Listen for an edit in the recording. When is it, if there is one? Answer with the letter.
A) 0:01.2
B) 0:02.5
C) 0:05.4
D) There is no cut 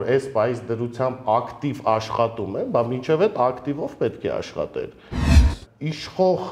C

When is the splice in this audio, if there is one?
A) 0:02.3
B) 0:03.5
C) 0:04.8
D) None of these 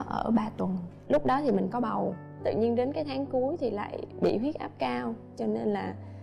A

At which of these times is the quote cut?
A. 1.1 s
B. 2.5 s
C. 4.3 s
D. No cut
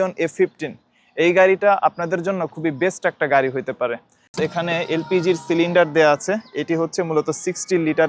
C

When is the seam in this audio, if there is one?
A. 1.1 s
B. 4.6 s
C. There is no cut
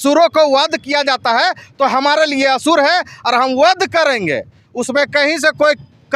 C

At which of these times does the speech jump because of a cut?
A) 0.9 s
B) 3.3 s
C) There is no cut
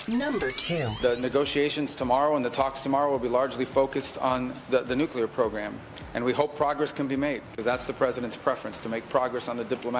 A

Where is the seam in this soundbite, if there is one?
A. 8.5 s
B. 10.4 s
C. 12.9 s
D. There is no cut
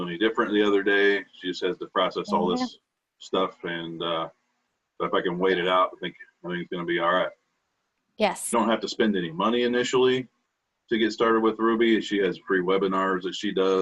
A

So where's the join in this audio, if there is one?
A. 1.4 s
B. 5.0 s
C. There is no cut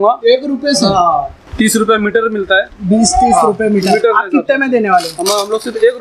A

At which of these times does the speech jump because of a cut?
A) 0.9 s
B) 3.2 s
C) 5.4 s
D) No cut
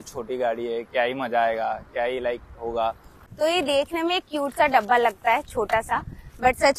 B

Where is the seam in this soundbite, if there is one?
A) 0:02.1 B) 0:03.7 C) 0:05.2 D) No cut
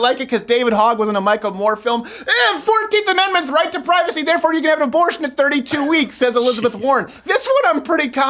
D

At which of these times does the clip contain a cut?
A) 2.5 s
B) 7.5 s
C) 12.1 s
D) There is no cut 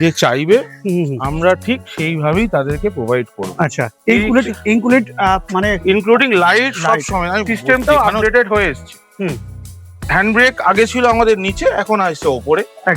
B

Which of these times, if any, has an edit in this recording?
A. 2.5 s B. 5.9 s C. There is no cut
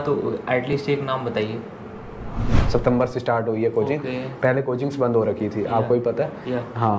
A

